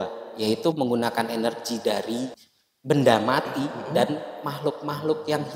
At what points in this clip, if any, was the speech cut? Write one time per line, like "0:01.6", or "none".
none